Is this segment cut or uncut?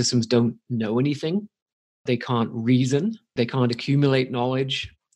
cut